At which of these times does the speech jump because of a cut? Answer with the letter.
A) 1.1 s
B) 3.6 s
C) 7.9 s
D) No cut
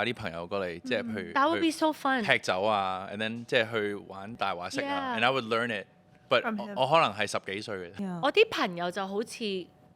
C